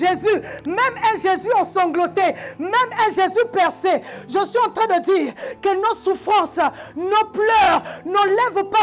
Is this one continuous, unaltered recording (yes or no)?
yes